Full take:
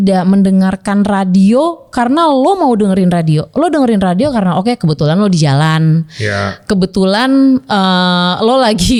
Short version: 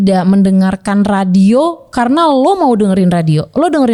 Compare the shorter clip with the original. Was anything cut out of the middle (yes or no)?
no